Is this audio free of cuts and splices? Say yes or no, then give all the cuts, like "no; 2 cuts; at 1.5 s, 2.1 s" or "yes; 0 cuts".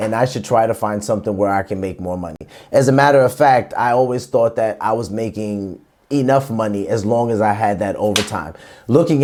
yes; 0 cuts